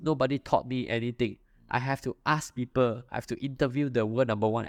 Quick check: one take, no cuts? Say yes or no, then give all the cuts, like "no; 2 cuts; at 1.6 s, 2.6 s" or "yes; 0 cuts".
yes; 0 cuts